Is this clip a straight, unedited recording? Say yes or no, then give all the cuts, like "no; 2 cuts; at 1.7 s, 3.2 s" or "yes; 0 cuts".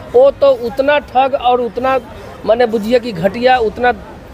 yes; 0 cuts